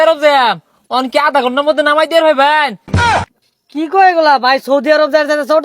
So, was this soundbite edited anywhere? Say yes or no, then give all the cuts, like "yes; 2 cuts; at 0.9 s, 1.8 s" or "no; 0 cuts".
yes; 1 cut; at 3.2 s